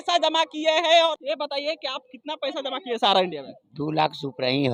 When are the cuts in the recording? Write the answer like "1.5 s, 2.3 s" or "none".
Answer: 1.1 s